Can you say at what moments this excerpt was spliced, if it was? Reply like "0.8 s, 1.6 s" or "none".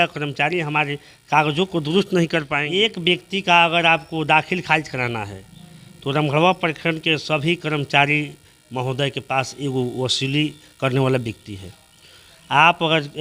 2.6 s